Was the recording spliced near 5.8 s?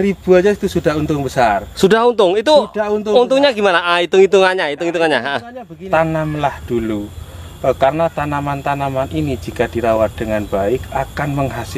yes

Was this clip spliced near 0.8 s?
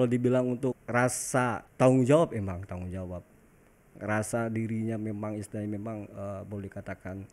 yes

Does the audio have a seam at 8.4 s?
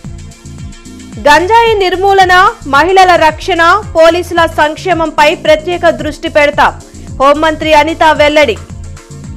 no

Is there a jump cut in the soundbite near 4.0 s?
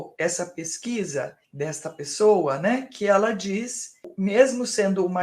yes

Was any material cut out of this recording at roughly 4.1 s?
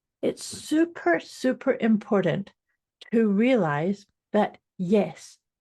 yes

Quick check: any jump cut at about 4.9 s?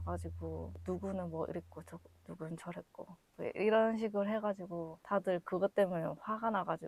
no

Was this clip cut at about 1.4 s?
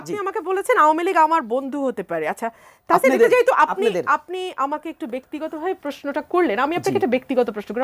no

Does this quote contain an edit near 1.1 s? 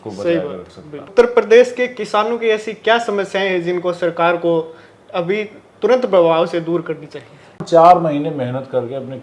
yes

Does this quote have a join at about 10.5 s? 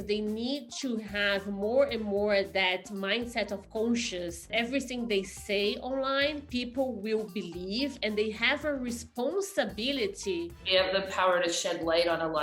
yes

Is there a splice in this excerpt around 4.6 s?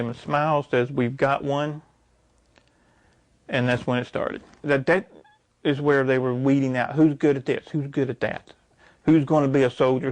yes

